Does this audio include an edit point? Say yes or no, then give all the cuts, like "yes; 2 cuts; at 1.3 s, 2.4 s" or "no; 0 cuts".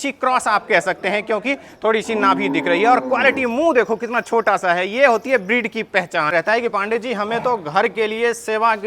yes; 1 cut; at 6.3 s